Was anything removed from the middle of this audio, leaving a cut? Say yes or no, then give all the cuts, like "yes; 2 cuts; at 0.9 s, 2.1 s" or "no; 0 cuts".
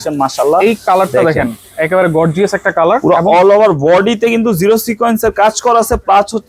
no; 0 cuts